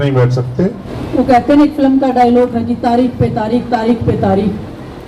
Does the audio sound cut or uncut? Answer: cut